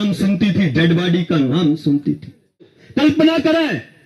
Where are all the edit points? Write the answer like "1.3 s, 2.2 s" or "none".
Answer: 2.8 s